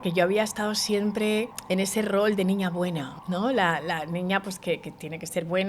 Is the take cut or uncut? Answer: cut